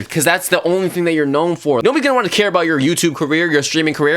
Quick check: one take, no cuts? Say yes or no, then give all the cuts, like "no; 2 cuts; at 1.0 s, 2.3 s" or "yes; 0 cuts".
no; 1 cut; at 1.8 s